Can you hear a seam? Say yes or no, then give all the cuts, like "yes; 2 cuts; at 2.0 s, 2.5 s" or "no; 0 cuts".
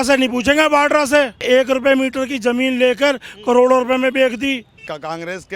yes; 2 cuts; at 1.4 s, 4.7 s